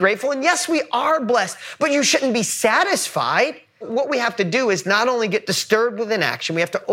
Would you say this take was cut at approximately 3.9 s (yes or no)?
yes